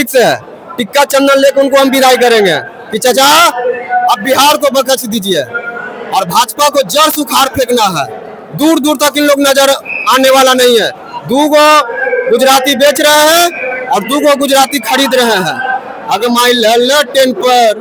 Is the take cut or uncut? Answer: uncut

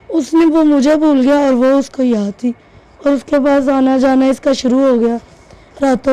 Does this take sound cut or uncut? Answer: uncut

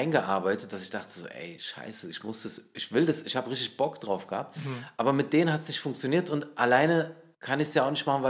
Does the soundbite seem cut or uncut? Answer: uncut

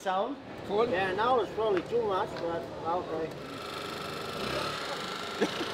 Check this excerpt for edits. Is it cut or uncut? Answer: cut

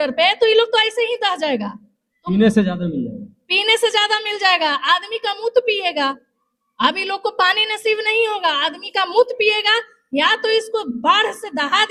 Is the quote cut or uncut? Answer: uncut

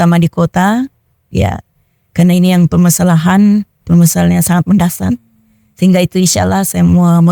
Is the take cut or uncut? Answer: uncut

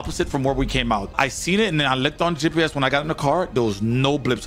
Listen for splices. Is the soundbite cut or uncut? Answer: uncut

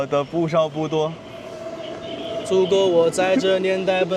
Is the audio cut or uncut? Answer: uncut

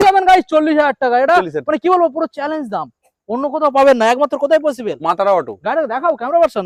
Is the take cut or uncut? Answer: uncut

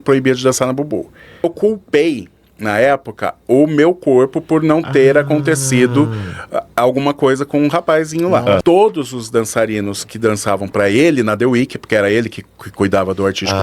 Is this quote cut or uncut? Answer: cut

